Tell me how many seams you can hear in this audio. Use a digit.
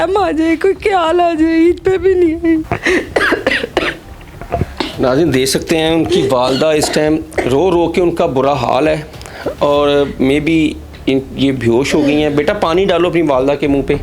1